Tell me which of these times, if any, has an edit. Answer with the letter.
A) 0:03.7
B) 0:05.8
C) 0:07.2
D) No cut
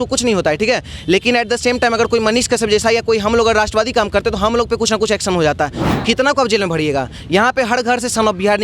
B